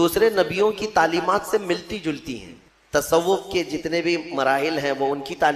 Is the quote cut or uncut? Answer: cut